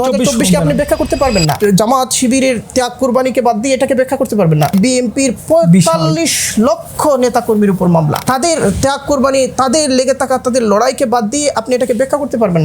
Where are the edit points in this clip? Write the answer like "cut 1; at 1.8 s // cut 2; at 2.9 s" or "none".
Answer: cut 1; at 1.6 s // cut 2; at 4.7 s // cut 3; at 8.2 s

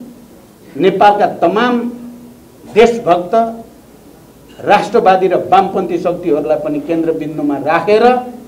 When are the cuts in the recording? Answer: none

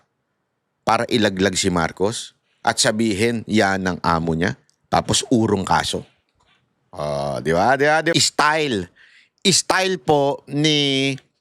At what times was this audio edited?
cut 1; at 8.1 s

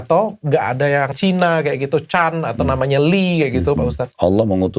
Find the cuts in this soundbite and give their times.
cut 1; at 1.1 s // cut 2; at 4.0 s

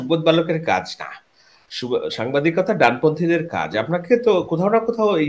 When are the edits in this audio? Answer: none

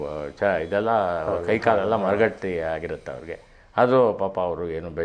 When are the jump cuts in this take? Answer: none

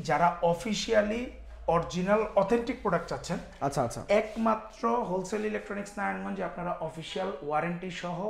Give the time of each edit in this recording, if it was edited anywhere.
none

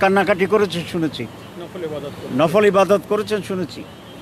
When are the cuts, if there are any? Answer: none

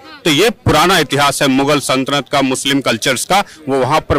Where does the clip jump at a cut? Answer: none

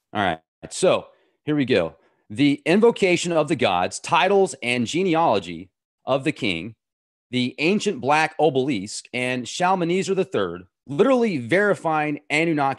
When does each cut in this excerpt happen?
cut 1; at 2.6 s

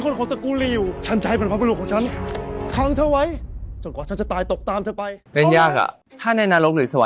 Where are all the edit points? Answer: cut 1; at 5.3 s // cut 2; at 6.1 s

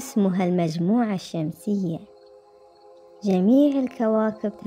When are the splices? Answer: none

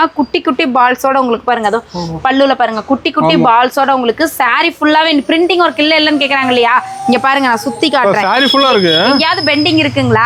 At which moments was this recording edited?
none

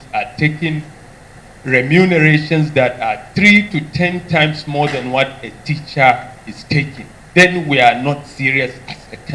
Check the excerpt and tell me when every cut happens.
none

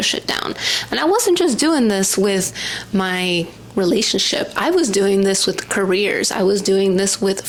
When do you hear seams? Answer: none

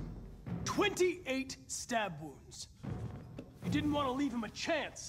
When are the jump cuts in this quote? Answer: none

